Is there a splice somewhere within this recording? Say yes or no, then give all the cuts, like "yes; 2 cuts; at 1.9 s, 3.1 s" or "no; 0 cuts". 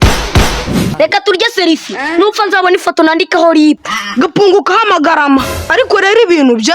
yes; 1 cut; at 0.9 s